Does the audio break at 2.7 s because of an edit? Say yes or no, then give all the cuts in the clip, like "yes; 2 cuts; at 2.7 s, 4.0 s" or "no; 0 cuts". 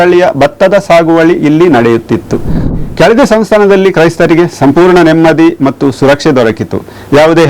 yes; 1 cut; at 2.7 s